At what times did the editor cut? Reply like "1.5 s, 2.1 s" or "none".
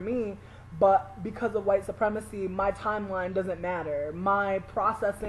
2.3 s